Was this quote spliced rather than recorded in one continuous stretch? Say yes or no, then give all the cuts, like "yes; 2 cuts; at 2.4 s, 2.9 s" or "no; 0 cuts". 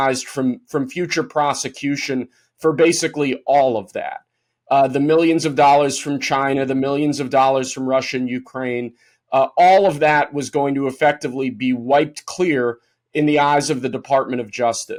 no; 0 cuts